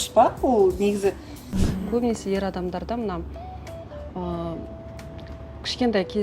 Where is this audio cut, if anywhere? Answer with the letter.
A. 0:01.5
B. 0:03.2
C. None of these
A